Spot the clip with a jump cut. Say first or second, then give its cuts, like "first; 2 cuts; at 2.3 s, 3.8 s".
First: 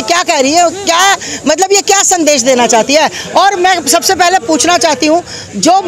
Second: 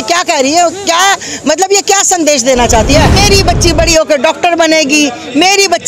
second; 1 cut; at 3.2 s